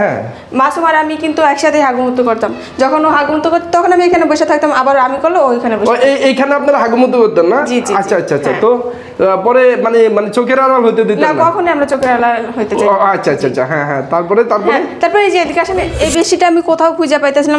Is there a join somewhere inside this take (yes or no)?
yes